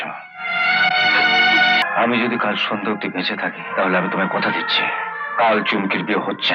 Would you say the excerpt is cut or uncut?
cut